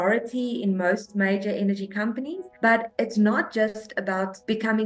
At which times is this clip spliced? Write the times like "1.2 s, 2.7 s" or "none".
2.9 s